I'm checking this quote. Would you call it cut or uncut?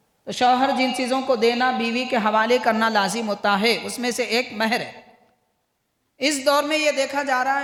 uncut